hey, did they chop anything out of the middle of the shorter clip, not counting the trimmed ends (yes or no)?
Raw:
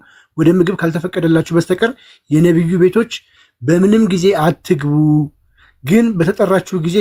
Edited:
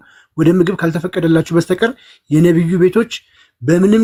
no